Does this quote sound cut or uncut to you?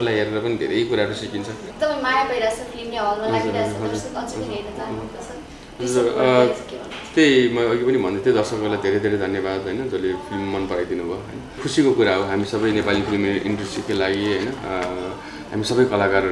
cut